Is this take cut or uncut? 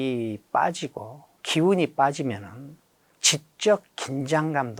cut